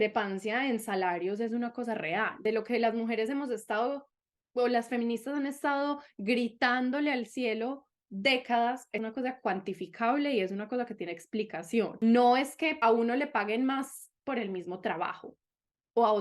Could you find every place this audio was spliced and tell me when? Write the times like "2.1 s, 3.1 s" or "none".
2.4 s, 9.0 s, 12.0 s, 12.8 s